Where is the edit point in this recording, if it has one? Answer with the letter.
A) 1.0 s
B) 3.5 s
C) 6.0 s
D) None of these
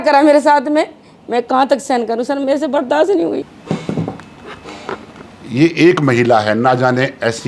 B